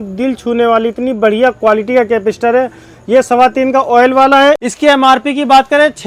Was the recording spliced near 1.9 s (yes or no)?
no